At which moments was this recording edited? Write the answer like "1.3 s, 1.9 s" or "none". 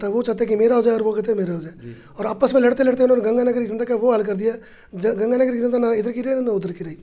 none